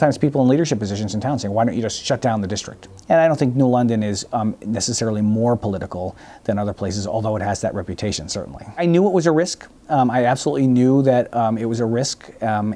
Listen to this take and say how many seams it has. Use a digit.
2